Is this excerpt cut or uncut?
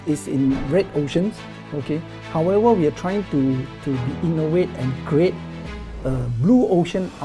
uncut